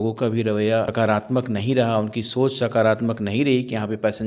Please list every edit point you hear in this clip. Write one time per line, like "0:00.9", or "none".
0:00.9